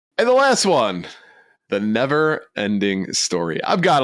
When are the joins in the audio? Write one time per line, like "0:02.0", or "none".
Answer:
0:01.1